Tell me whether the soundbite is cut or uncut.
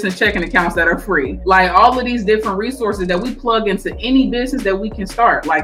cut